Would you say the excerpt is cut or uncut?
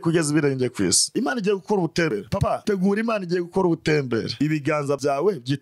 cut